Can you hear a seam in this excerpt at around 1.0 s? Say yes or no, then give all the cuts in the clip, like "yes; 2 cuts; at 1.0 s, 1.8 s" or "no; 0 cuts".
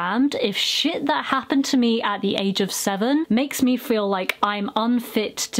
no; 0 cuts